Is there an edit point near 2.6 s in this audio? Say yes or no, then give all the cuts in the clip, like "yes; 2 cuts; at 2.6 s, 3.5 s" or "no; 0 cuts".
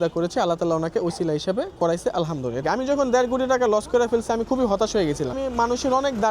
yes; 2 cuts; at 2.6 s, 5.4 s